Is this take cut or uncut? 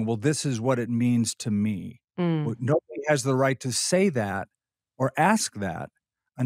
uncut